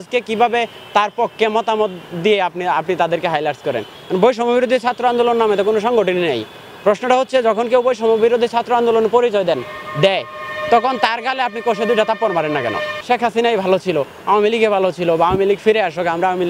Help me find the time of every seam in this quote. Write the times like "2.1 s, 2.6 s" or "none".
4.0 s, 12.9 s